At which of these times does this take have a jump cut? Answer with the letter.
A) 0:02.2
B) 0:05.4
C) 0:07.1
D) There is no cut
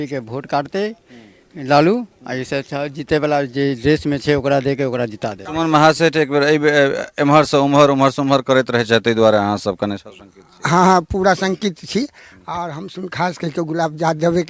B